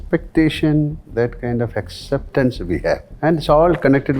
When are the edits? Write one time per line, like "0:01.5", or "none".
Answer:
0:03.1